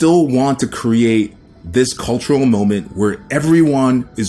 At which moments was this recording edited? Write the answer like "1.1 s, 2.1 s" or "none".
none